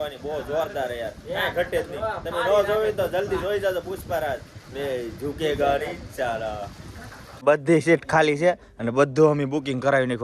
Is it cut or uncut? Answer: cut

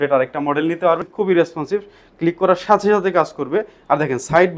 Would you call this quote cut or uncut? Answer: cut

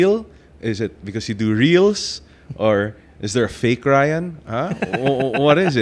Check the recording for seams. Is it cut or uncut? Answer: uncut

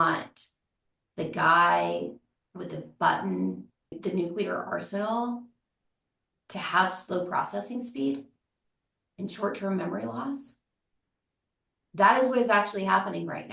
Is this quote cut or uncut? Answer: cut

